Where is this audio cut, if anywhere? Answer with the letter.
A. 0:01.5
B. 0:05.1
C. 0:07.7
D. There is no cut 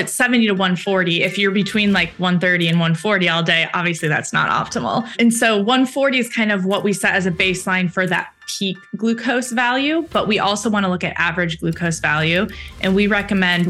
B